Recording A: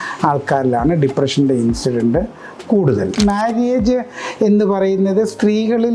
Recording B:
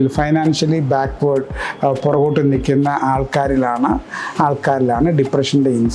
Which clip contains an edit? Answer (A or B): A